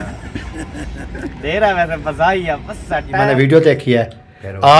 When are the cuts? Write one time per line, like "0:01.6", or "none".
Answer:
0:03.3